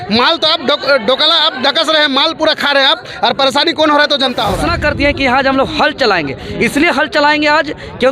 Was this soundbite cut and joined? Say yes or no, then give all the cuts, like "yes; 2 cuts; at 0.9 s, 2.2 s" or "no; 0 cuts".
yes; 1 cut; at 4.7 s